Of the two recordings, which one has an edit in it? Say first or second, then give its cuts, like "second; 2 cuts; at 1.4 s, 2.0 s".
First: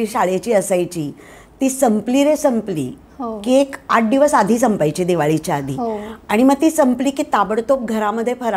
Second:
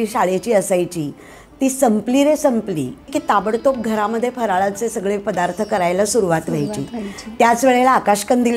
second; 1 cut; at 3.2 s